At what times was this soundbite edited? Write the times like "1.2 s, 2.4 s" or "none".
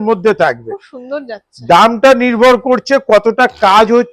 none